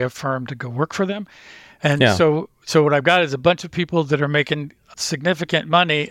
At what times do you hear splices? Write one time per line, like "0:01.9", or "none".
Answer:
0:04.8